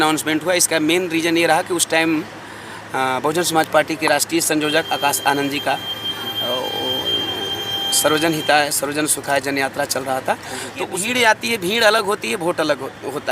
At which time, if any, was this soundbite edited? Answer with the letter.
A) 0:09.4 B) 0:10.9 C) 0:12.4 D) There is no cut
B